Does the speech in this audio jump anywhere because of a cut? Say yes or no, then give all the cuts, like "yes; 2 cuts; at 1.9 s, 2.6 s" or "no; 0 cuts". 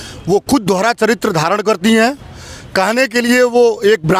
no; 0 cuts